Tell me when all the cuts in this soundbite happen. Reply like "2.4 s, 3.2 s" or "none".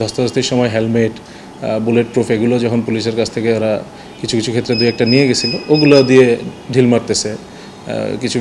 none

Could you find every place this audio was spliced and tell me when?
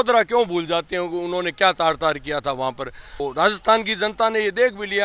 3.2 s

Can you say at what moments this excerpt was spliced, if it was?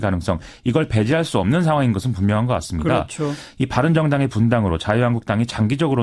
1.5 s

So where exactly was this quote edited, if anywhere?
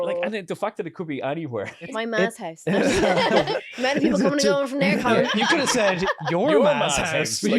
1.9 s, 3.5 s, 5.3 s

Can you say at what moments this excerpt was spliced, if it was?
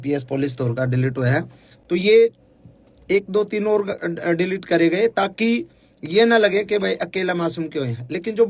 none

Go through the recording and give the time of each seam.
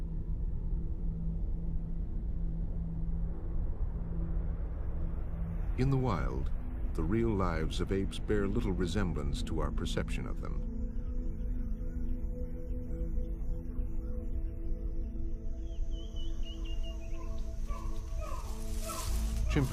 14.4 s

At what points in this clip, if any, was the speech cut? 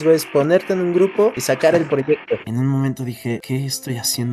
2.4 s, 3.4 s

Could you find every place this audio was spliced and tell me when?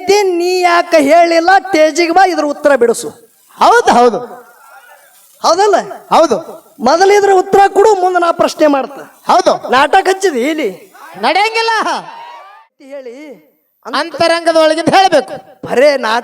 12.5 s

